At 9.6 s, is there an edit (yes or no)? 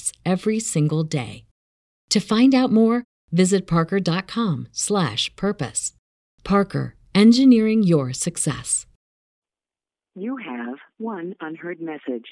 yes